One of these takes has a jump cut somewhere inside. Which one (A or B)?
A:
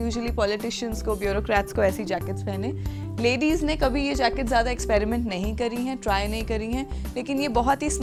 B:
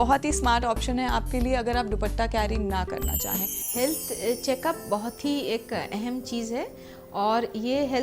B